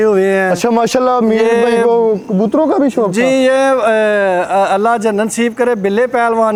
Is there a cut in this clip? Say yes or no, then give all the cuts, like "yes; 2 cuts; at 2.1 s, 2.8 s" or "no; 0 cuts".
no; 0 cuts